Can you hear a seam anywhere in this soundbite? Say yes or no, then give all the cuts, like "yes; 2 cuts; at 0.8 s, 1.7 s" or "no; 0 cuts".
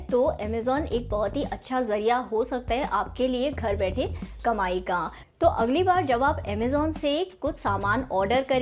no; 0 cuts